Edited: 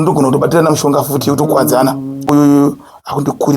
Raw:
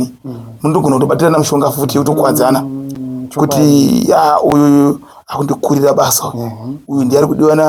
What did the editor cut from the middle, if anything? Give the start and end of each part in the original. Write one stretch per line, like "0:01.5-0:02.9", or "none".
0:03.0-0:04.5